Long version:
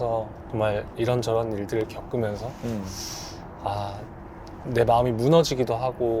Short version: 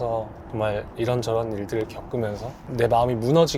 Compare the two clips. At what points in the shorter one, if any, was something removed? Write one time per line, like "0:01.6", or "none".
0:02.5

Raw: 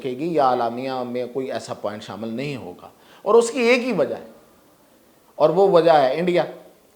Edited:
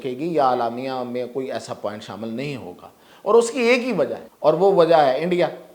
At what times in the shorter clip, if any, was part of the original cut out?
0:04.2

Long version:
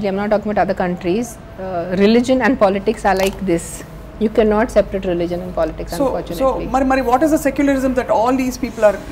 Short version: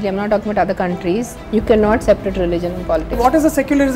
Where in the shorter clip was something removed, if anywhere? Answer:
0:01.4
0:03.2

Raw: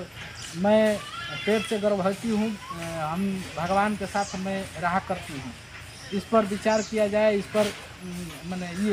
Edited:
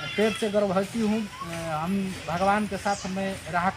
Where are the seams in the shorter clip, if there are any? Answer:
none

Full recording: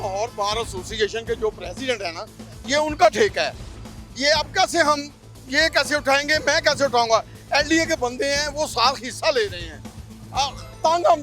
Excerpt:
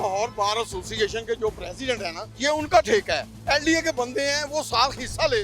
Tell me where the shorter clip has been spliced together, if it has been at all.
0:02.2
0:03.3

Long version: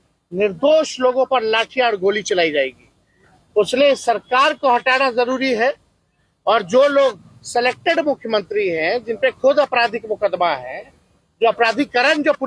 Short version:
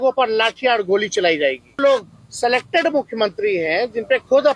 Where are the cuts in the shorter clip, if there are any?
0:01.8

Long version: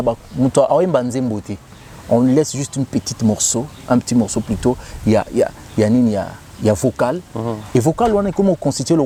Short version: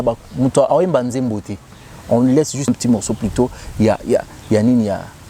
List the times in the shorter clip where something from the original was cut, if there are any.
0:02.7

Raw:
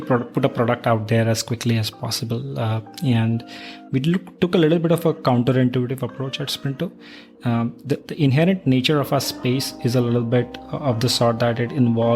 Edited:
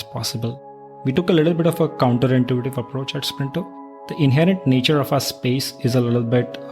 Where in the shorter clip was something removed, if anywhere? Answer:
0:01.0
0:04.1

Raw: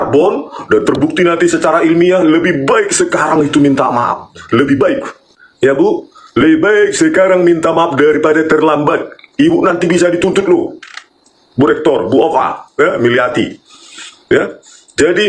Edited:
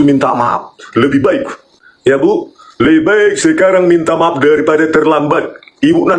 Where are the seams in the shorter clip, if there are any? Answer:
none

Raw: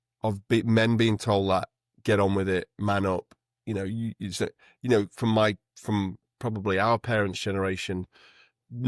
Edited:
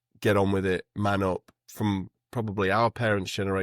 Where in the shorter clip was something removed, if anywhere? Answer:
0:01.6

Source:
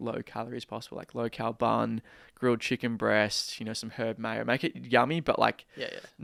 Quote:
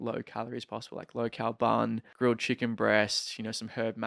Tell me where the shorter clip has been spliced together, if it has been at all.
0:02.1

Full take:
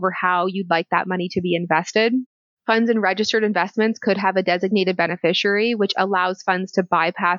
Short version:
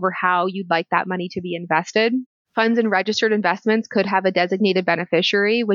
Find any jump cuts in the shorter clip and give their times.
0:02.4

